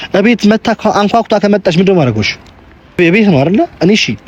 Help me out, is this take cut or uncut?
uncut